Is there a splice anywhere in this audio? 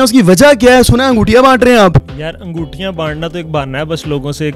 yes; 1 cut; at 2.1 s

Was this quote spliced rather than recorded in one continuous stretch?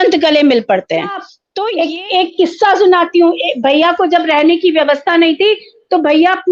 yes; 1 cut; at 1.7 s

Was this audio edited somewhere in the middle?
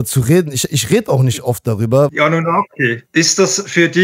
yes; 2 cuts; at 2.1 s, 3.0 s

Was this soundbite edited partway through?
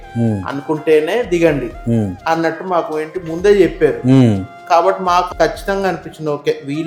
yes; 1 cut; at 5.3 s

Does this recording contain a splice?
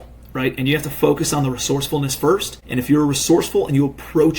yes; 1 cut; at 2.6 s

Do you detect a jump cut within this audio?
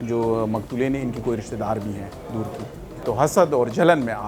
yes; 1 cut; at 3.0 s

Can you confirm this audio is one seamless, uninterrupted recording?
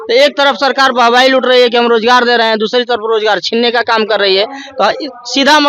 yes; 0 cuts

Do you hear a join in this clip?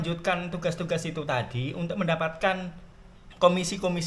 yes; 1 cut; at 2.8 s

